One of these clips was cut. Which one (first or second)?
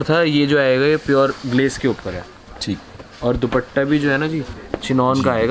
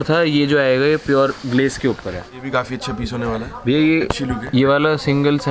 second